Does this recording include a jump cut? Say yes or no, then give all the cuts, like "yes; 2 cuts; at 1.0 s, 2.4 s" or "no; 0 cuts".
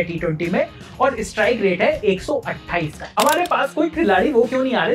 yes; 1 cut; at 3.0 s